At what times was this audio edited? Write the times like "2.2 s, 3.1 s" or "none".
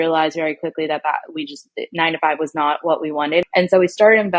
3.4 s